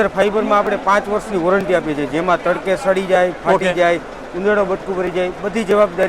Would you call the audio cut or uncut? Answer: uncut